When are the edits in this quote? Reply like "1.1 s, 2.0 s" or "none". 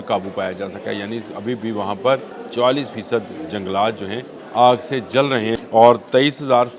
2.4 s, 4.3 s, 5.6 s